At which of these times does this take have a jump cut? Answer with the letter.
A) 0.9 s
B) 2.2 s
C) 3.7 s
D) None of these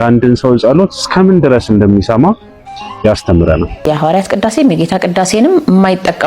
C